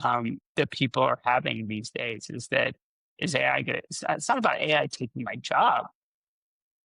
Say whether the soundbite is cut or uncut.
uncut